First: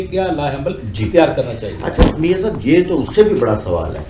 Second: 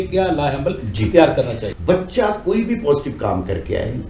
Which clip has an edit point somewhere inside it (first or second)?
second